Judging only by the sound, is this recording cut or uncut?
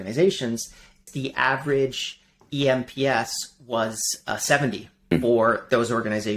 cut